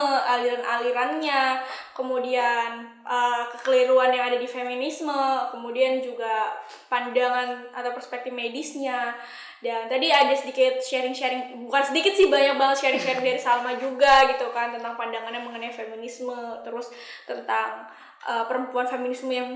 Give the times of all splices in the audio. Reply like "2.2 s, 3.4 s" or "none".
none